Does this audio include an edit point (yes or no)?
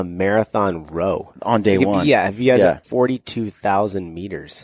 yes